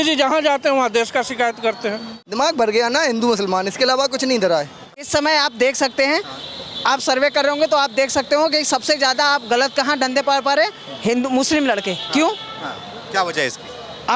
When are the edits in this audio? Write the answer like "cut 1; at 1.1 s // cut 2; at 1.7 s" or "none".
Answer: cut 1; at 2.2 s // cut 2; at 5.1 s